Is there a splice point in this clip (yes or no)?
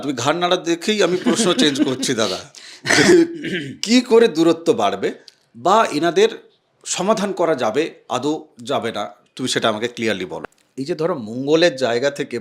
yes